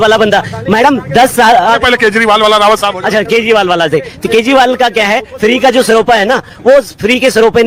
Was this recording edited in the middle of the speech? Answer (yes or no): no